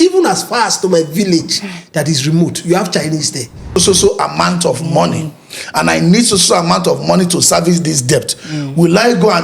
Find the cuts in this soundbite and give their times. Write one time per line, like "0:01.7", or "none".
0:03.7